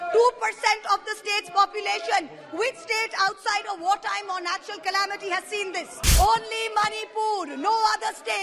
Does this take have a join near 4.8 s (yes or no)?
no